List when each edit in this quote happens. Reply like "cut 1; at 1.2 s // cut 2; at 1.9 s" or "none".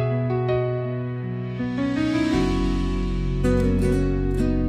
cut 1; at 1.6 s